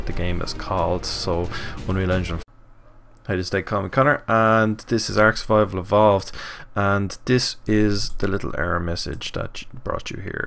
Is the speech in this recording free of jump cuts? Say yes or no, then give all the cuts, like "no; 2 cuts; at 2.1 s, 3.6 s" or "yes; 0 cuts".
yes; 0 cuts